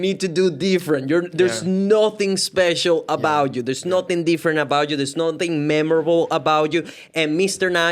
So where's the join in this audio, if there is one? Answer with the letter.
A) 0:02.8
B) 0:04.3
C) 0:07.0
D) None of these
D